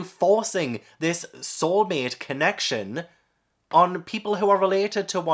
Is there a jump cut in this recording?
no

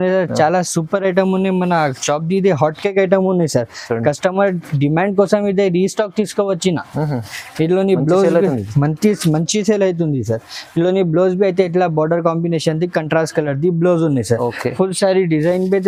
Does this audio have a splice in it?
no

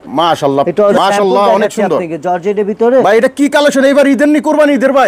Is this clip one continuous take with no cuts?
no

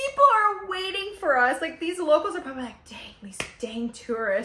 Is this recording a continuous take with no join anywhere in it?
yes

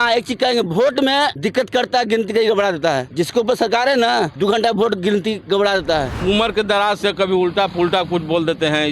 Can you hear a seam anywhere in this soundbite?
yes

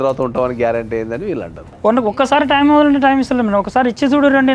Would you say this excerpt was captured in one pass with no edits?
no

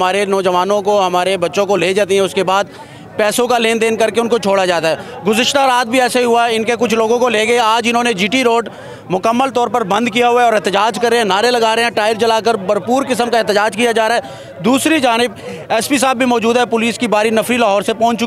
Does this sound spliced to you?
no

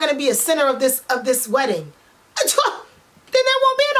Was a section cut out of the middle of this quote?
no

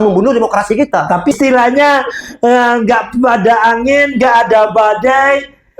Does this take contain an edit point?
yes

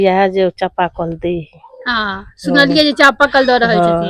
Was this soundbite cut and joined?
no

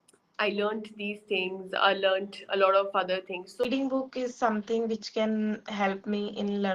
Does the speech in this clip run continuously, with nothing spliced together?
no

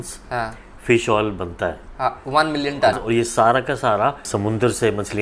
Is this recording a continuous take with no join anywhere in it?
no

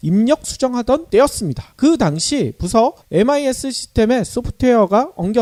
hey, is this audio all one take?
yes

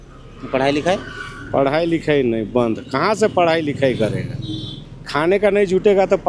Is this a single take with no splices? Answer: yes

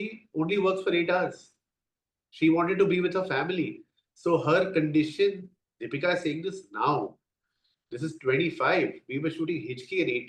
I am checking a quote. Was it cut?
no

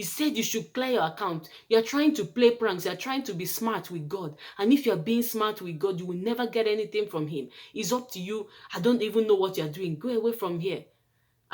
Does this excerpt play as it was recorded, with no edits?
yes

